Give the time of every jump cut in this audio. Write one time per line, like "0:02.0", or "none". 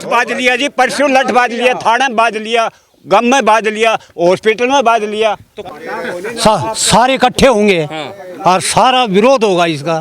0:05.7